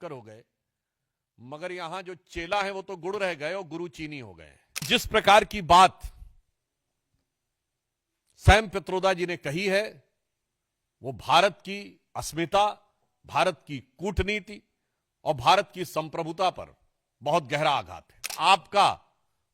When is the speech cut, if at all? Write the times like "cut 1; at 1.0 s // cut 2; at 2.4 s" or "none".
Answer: cut 1; at 4.9 s // cut 2; at 18.3 s